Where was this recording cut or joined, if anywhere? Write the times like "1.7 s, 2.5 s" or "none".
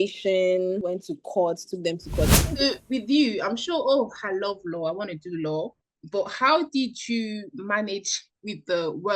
2.3 s